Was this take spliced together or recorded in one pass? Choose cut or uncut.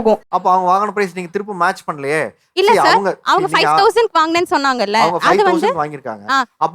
uncut